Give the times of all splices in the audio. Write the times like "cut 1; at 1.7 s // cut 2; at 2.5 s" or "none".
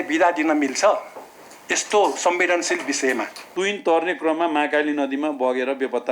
cut 1; at 3.4 s

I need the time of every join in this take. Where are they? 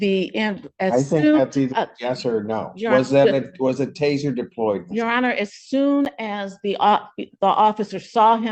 none

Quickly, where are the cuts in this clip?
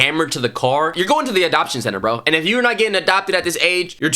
cut 1; at 0.9 s

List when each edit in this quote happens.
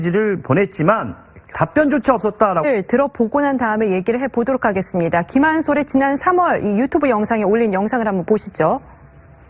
none

